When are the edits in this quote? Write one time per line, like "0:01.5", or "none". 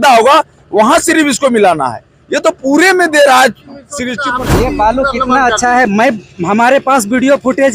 0:04.2